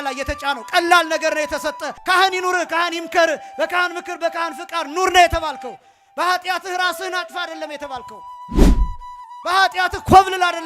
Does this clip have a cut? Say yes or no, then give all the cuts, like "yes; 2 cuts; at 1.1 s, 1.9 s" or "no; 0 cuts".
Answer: yes; 1 cut; at 1.9 s